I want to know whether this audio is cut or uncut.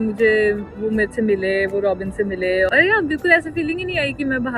uncut